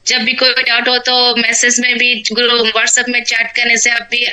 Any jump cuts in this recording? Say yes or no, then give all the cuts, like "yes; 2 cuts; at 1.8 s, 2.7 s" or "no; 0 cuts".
no; 0 cuts